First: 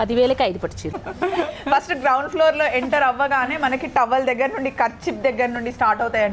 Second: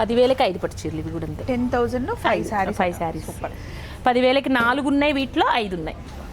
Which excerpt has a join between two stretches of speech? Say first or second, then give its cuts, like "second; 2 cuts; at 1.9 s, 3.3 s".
first; 1 cut; at 1.0 s